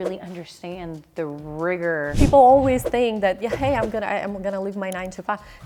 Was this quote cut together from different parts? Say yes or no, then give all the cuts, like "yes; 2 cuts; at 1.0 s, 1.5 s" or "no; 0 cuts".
yes; 1 cut; at 2.1 s